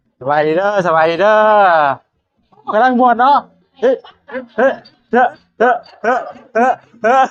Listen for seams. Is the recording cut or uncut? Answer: uncut